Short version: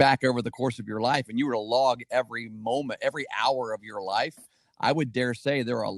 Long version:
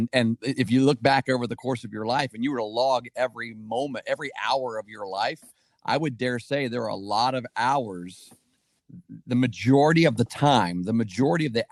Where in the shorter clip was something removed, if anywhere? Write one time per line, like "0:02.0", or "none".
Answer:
none